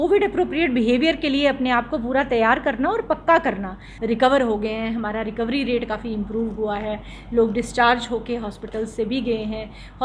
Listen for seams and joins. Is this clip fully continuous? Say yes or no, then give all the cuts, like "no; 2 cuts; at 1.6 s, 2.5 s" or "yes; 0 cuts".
no; 1 cut; at 3.8 s